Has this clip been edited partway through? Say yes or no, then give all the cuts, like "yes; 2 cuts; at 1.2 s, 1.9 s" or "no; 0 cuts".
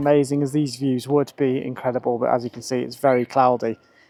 no; 0 cuts